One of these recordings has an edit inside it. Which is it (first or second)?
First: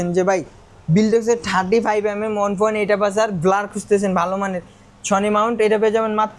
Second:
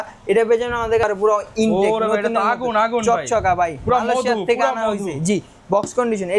second